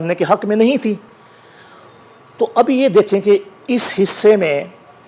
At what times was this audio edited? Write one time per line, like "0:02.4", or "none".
none